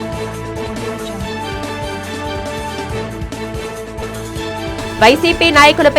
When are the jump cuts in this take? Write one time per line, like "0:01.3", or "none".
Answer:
0:01.3